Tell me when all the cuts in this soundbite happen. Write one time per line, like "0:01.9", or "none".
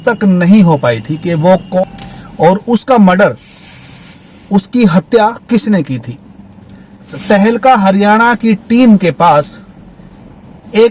0:01.8
0:07.1